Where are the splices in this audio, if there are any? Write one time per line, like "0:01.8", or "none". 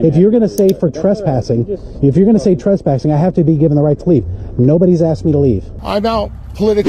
0:05.7